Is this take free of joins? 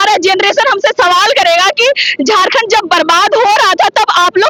yes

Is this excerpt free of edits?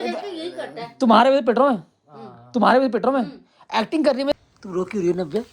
no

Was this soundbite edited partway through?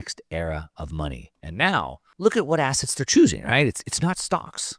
yes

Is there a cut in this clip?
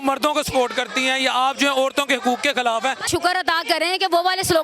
yes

